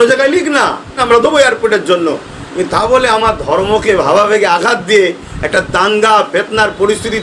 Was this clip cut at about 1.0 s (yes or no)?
yes